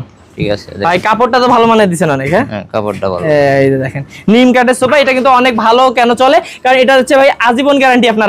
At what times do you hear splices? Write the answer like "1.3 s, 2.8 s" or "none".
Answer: none